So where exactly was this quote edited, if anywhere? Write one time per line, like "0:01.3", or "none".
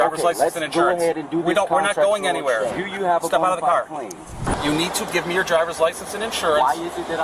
0:02.8
0:04.4